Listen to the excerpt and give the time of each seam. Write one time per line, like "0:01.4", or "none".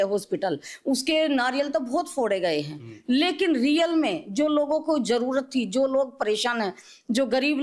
none